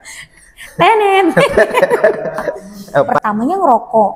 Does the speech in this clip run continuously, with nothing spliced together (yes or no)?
no